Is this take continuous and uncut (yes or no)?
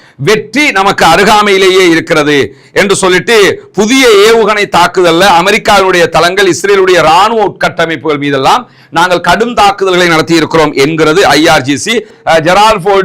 no